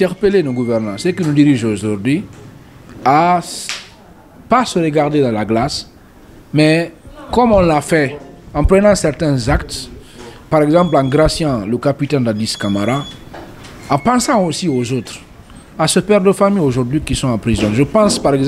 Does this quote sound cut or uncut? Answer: uncut